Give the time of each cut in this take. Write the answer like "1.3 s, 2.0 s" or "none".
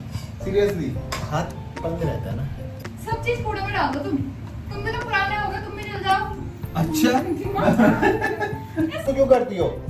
2.6 s, 9.0 s